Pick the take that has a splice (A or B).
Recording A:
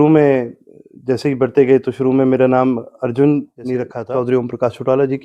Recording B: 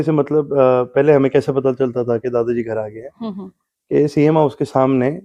A